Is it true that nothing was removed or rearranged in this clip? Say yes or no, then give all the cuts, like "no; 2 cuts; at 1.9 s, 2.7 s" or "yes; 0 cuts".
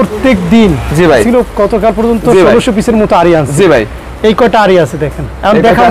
no; 1 cut; at 1.2 s